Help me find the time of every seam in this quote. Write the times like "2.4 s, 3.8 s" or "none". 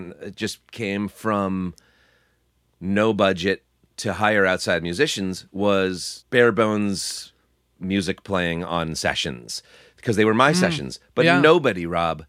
none